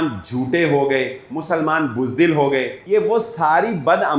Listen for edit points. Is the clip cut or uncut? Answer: cut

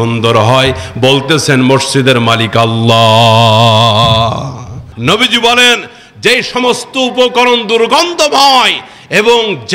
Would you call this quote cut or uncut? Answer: cut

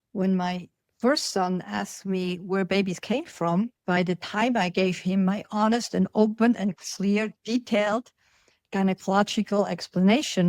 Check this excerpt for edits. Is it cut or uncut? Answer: cut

